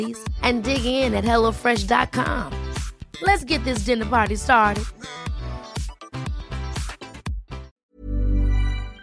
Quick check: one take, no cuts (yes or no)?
no